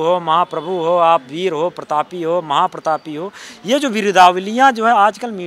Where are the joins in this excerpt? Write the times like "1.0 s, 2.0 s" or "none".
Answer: none